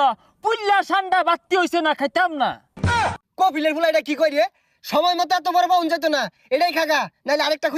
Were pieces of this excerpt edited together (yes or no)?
yes